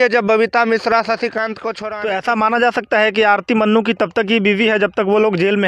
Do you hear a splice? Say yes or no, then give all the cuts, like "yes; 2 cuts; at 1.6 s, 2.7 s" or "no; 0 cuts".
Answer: yes; 1 cut; at 1.8 s